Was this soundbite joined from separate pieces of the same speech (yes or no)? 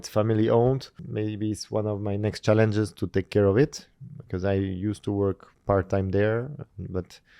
yes